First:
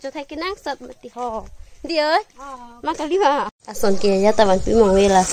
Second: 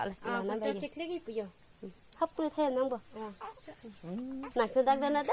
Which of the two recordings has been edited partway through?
first; 1 cut; at 3.6 s

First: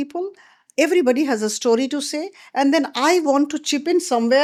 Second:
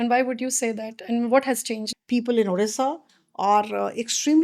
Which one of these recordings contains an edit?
second; 1 cut; at 1.8 s

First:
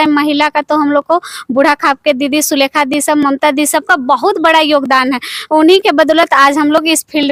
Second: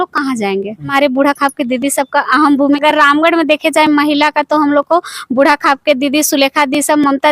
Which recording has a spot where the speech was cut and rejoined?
second; 2 cuts; at 0.9 s, 2.8 s

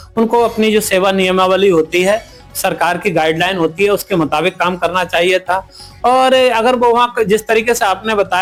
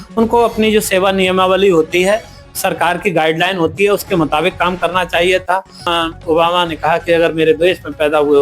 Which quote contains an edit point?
second; 1 cut; at 5.9 s

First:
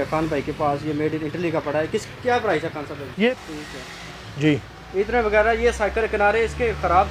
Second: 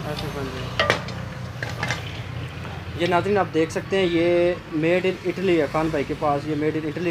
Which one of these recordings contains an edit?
first; 1 cut; at 3.4 s

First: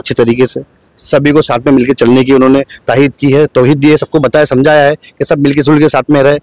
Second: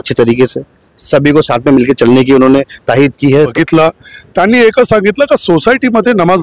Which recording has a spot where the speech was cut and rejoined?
second; 1 cut; at 3.5 s

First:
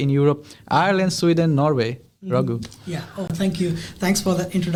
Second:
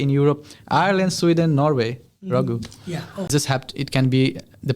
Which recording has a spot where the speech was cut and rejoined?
second; 1 cut; at 3.3 s

